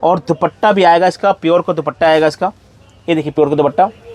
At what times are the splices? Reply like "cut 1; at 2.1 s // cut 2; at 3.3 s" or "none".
none